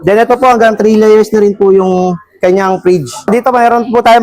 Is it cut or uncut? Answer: cut